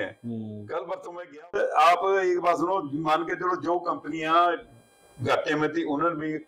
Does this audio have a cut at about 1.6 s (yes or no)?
yes